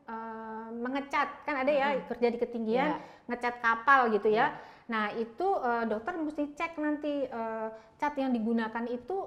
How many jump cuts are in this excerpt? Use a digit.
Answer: 0